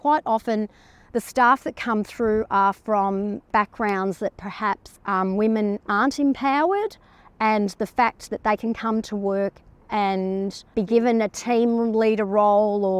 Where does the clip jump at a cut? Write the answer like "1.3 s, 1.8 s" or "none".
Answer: 3.5 s, 4.9 s